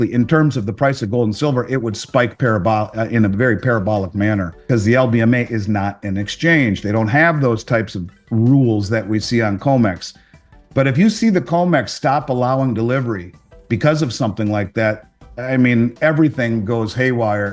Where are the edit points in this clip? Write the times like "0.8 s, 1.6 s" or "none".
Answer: 4.7 s